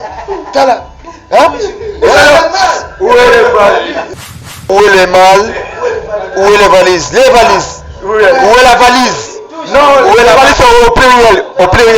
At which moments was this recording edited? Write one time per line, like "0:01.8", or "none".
0:04.1